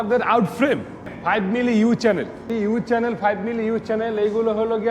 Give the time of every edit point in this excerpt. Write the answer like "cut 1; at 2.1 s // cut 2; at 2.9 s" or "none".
cut 1; at 1.0 s // cut 2; at 2.5 s

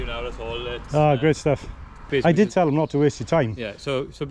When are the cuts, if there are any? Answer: cut 1; at 2.0 s

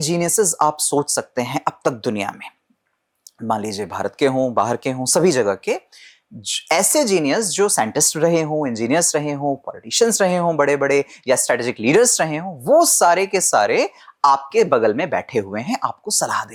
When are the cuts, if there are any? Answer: none

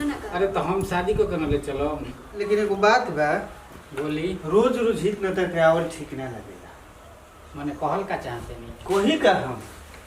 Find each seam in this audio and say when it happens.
cut 1; at 2.3 s

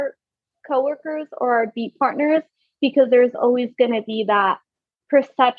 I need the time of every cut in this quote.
none

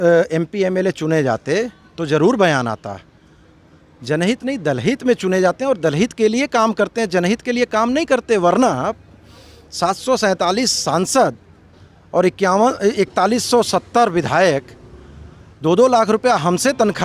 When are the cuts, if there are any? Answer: none

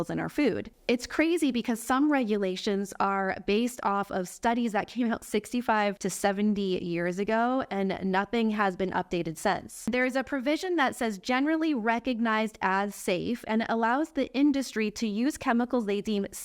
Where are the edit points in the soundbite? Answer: cut 1; at 6.1 s // cut 2; at 9.9 s

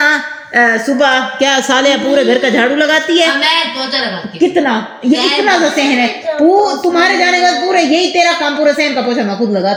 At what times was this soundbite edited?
none

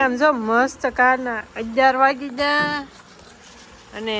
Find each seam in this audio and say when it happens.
none

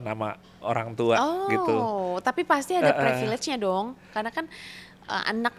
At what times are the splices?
none

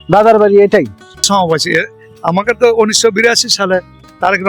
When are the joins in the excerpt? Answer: cut 1; at 1.2 s

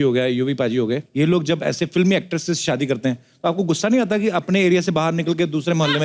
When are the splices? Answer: cut 1; at 1.1 s

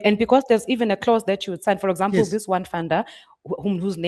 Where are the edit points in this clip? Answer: none

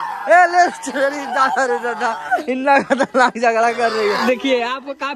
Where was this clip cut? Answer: cut 1; at 4.1 s

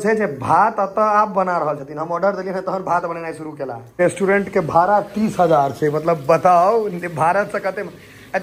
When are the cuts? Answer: cut 1; at 3.8 s

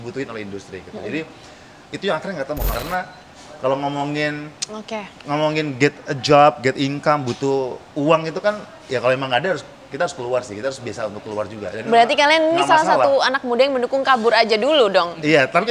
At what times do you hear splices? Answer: cut 1; at 2.7 s

